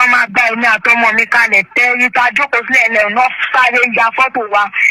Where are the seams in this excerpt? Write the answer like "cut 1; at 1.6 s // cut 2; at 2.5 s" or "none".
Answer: none

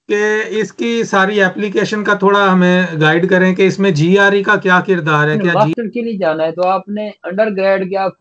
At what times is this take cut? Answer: cut 1; at 5.4 s

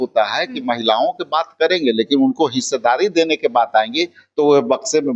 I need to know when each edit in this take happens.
none

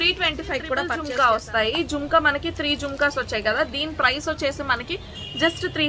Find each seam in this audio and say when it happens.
cut 1; at 1.0 s

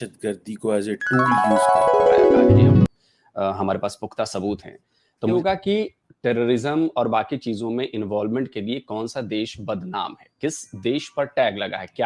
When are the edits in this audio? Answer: cut 1; at 1.3 s // cut 2; at 2.9 s

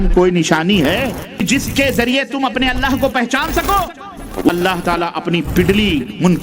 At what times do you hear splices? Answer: cut 1; at 1.4 s // cut 2; at 4.5 s

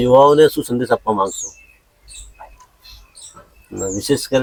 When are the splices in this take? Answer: none

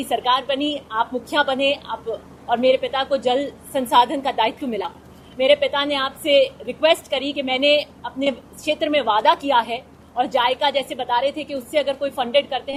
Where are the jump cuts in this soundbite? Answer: none

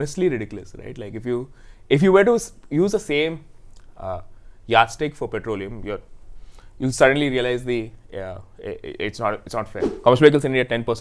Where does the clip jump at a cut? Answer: cut 1; at 9.8 s

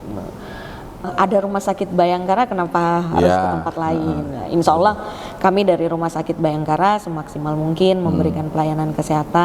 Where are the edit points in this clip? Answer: cut 1; at 1.1 s

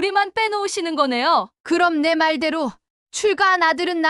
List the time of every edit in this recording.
cut 1; at 1.5 s

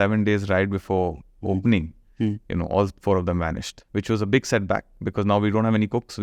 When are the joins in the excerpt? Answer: cut 1; at 3.8 s

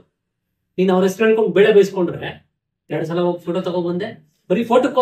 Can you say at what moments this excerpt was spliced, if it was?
cut 1; at 2.9 s

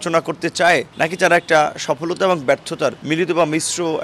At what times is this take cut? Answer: cut 1; at 0.9 s // cut 2; at 3.0 s

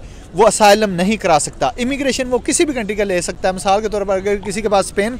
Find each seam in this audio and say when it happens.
none

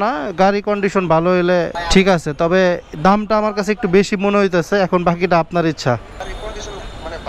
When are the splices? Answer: cut 1; at 1.8 s // cut 2; at 6.2 s

